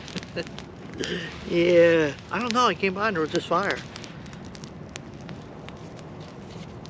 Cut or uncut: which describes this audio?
cut